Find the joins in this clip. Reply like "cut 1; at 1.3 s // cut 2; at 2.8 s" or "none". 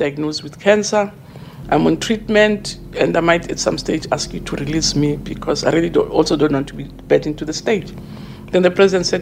none